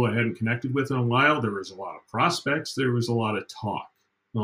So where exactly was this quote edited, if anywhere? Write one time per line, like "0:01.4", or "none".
none